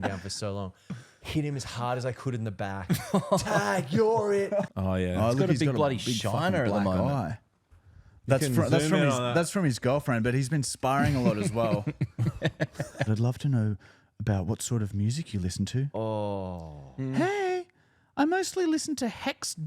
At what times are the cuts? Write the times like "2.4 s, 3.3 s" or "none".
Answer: 4.7 s, 13.1 s